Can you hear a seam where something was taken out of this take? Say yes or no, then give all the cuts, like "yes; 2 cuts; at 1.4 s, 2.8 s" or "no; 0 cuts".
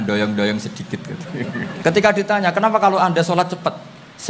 yes; 1 cut; at 1.7 s